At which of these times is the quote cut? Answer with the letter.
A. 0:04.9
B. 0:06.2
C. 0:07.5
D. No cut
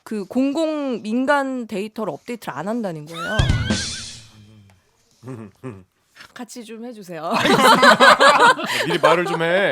B